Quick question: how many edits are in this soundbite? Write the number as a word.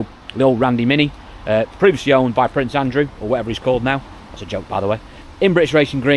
zero